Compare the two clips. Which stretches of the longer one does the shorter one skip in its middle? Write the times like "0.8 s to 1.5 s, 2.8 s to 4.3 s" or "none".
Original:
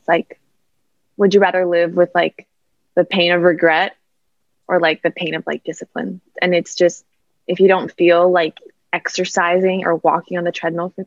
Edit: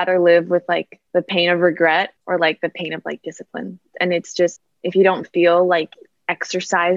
2.4 s to 2.8 s, 4.0 s to 4.6 s, 7.1 s to 7.3 s